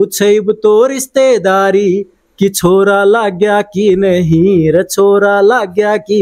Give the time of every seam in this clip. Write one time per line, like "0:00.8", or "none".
none